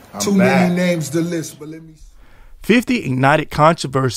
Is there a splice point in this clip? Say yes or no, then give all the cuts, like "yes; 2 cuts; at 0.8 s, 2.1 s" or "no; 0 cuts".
yes; 1 cut; at 1.6 s